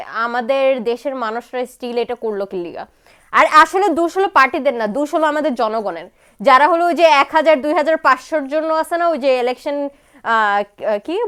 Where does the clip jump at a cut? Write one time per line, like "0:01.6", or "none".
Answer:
none